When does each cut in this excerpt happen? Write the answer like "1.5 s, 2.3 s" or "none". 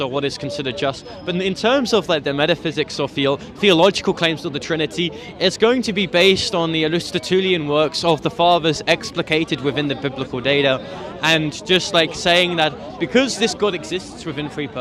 none